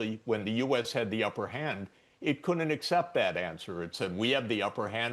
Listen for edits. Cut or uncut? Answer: uncut